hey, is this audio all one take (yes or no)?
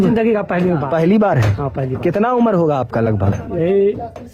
yes